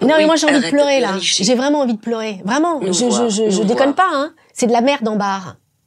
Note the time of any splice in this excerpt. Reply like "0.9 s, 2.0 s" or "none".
4.4 s